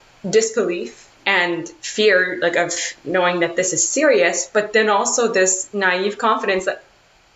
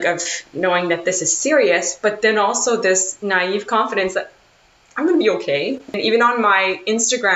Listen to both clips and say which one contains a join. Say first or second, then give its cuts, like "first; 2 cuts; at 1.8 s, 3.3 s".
second; 1 cut; at 6.0 s